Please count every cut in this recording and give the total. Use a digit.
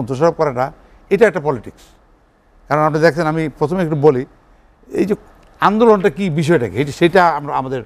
0